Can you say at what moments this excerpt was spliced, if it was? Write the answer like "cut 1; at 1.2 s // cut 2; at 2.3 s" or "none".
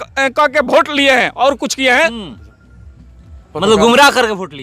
none